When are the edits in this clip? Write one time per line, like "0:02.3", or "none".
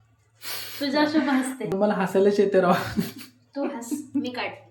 none